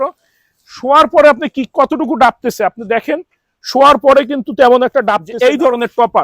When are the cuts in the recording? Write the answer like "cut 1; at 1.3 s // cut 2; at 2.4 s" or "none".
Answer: cut 1; at 5.3 s

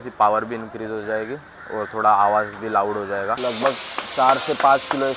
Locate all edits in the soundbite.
cut 1; at 3.3 s

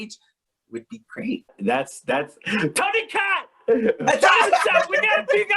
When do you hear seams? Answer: cut 1; at 1.5 s

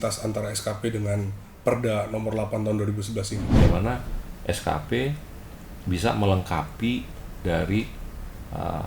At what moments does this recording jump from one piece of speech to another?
cut 1; at 3.6 s

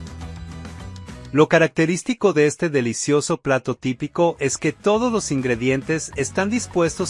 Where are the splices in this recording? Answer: cut 1; at 1.3 s

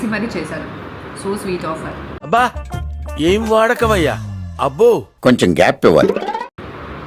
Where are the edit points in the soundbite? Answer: none

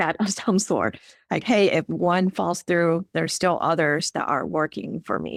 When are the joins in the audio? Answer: none

